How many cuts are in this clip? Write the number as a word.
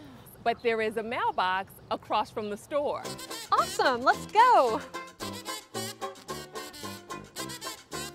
one